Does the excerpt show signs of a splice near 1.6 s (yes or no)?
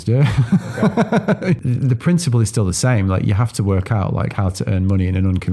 yes